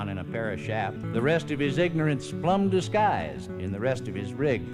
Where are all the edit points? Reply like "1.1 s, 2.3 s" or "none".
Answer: 1.0 s, 3.4 s